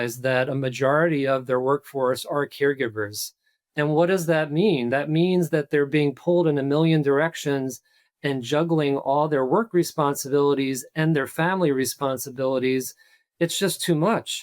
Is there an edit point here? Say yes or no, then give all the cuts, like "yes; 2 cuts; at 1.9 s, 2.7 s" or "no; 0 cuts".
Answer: no; 0 cuts